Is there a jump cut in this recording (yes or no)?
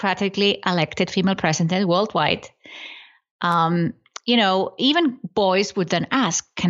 no